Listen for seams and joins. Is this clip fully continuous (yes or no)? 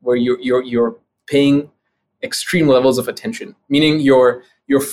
yes